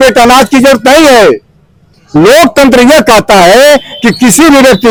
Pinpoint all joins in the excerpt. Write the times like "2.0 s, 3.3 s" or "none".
none